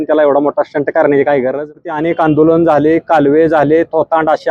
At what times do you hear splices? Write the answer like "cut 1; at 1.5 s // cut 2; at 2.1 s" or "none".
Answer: cut 1; at 1.9 s